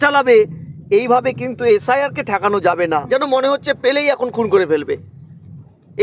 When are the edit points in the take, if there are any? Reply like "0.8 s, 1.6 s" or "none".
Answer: 3.0 s